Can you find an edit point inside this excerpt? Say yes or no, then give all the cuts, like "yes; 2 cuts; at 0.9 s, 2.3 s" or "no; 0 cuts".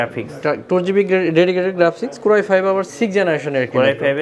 no; 0 cuts